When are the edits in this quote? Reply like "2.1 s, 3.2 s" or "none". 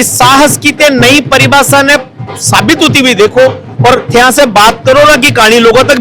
none